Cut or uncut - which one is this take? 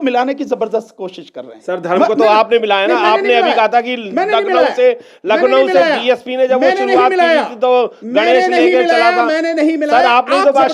uncut